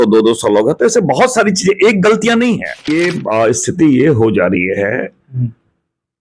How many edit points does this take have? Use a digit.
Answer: 1